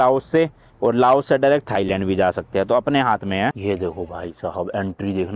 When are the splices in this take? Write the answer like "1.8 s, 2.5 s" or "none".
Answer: 3.5 s